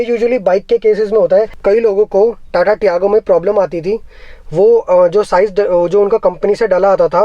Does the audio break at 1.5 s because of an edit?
yes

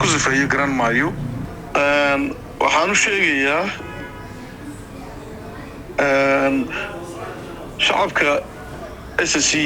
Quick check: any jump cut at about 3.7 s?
no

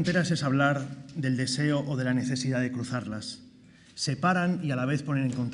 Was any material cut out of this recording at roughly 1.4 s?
no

